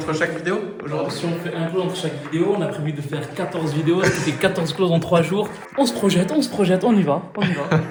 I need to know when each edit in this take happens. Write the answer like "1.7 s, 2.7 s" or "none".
none